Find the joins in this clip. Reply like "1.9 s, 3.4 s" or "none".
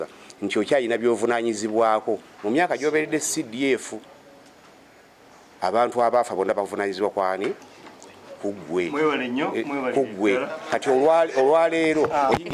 none